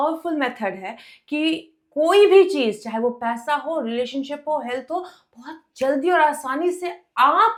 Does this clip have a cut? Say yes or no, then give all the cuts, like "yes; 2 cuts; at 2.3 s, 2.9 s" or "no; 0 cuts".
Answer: no; 0 cuts